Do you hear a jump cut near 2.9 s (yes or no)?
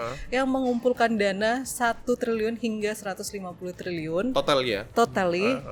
no